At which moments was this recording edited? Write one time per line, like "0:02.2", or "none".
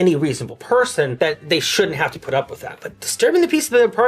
0:01.1

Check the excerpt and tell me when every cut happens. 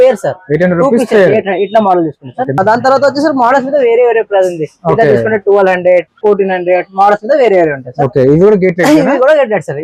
none

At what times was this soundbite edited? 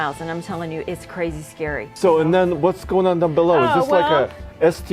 0:01.8

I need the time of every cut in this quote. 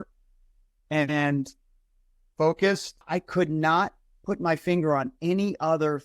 0:02.9

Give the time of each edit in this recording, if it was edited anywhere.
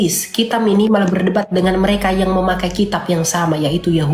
none

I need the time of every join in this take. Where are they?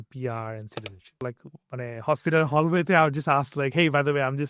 0:01.1

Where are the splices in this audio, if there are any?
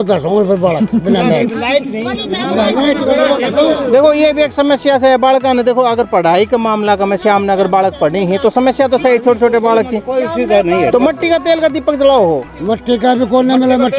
none

